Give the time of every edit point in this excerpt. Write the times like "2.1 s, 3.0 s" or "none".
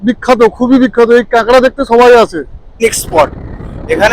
2.7 s